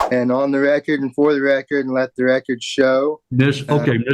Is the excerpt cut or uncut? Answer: uncut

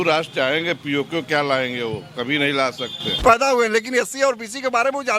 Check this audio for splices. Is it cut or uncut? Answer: cut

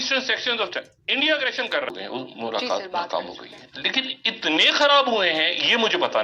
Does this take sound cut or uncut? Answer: cut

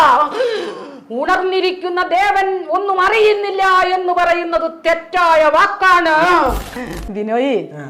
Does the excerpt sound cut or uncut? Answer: cut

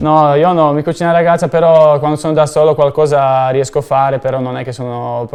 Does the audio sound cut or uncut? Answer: uncut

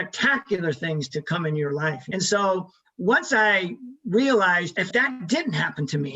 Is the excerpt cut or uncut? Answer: cut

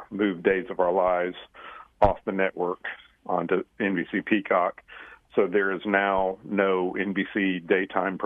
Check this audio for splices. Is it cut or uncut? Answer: uncut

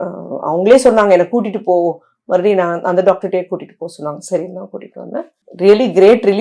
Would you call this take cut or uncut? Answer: uncut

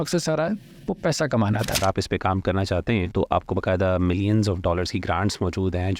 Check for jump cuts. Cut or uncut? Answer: cut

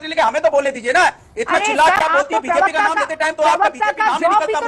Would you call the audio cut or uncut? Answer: uncut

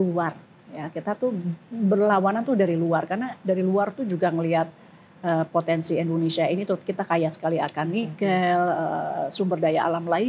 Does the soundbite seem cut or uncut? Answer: uncut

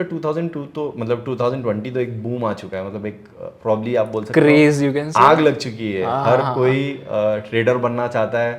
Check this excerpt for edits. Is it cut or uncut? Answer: uncut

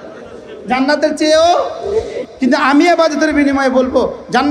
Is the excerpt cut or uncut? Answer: uncut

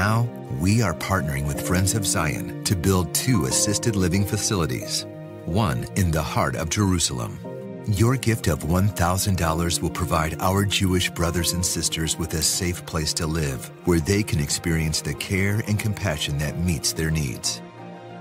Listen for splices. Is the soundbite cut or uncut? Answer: cut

